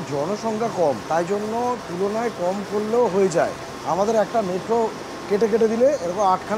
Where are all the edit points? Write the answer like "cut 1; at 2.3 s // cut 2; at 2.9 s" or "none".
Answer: cut 1; at 1.0 s // cut 2; at 3.7 s

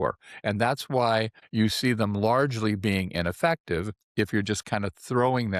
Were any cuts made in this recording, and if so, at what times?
cut 1; at 1.4 s // cut 2; at 4.0 s

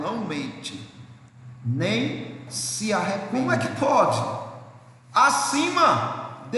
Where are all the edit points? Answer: cut 1; at 3.3 s

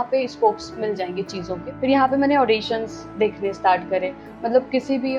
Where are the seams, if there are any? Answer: cut 1; at 1.6 s

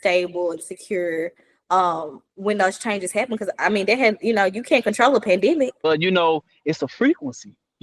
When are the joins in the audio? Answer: cut 1; at 5.7 s

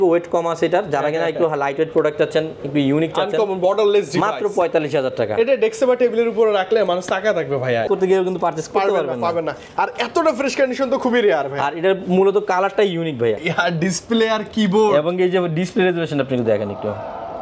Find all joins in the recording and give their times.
cut 1; at 7.8 s // cut 2; at 13.4 s

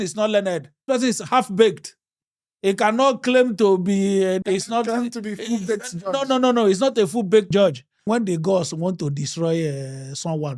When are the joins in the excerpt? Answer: cut 1; at 0.8 s // cut 2; at 4.4 s // cut 3; at 7.5 s

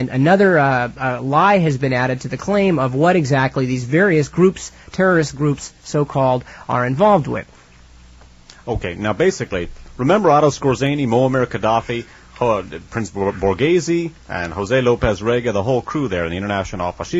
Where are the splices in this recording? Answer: cut 1; at 1.4 s

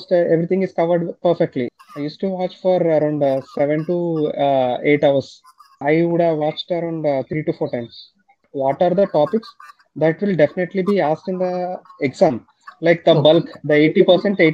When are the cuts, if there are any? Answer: cut 1; at 1.7 s // cut 2; at 5.8 s // cut 3; at 8.5 s

